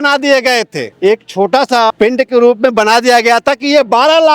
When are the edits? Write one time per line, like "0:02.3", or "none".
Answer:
0:00.9
0:01.9